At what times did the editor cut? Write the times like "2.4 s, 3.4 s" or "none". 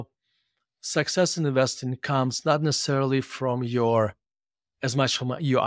none